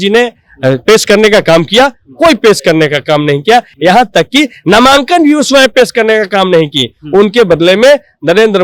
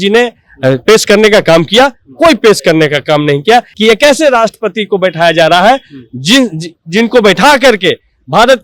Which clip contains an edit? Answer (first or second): second